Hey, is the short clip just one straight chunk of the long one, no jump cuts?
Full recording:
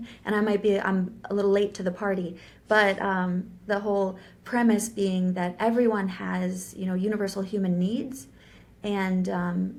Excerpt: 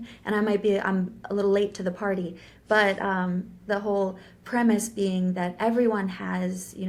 yes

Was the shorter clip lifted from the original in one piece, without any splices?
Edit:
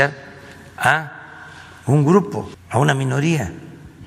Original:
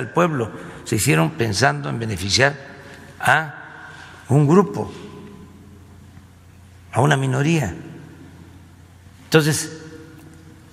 no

